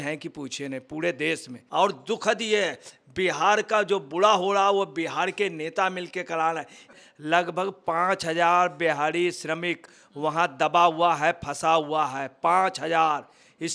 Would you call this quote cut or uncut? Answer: cut